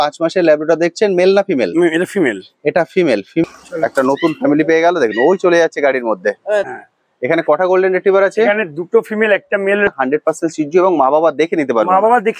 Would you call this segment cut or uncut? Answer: cut